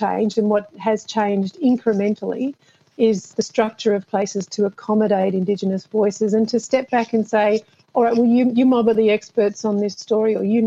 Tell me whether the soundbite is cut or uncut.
uncut